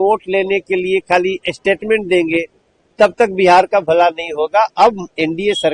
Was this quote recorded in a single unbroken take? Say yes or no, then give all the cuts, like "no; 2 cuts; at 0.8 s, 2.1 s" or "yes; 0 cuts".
yes; 0 cuts